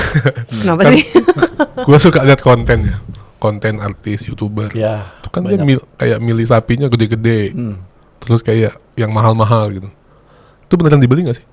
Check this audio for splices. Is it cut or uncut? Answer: uncut